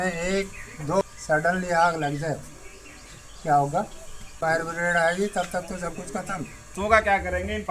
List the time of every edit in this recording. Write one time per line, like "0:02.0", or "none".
0:01.0
0:04.3
0:06.8